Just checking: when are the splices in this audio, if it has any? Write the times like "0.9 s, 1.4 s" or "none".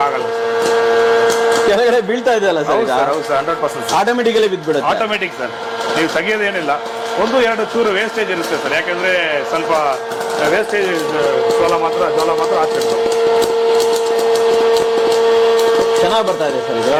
none